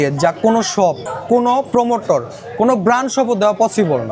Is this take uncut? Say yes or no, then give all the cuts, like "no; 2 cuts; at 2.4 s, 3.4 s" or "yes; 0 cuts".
no; 1 cut; at 1.1 s